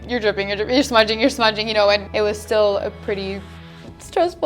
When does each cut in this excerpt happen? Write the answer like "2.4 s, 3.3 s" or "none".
2.1 s